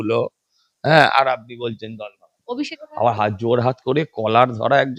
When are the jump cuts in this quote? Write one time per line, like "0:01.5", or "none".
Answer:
0:02.7